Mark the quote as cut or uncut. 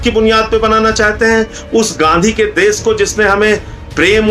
uncut